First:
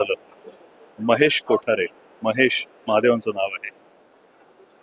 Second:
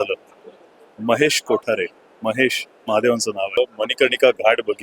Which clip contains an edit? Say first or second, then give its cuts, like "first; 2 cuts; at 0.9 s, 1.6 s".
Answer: second; 1 cut; at 3.6 s